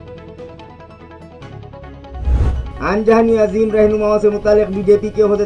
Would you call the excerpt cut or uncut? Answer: uncut